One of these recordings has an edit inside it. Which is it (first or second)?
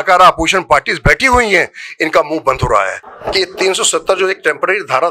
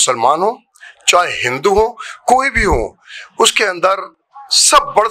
first